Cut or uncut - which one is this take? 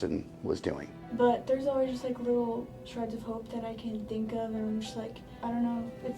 cut